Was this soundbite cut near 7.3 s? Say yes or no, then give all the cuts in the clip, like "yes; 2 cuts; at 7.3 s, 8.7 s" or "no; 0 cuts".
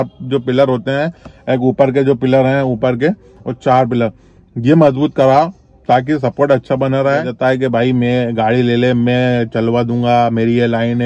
yes; 1 cut; at 7.3 s